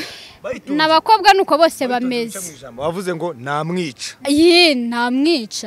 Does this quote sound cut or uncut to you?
cut